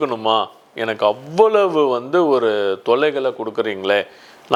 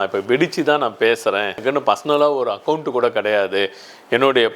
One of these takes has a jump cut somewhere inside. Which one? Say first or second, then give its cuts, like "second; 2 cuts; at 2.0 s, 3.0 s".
second; 1 cut; at 1.6 s